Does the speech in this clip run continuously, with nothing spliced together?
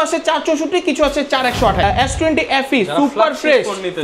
no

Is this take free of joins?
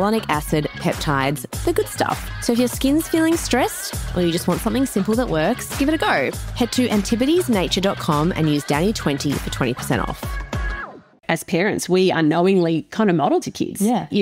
no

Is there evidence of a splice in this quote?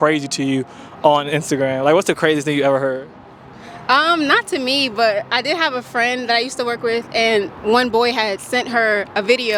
no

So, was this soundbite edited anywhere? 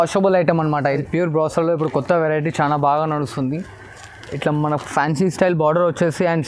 yes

